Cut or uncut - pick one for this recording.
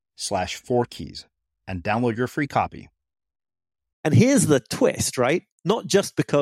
cut